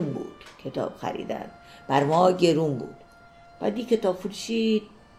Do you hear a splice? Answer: no; 0 cuts

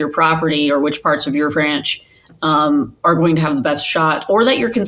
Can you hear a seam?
no; 0 cuts

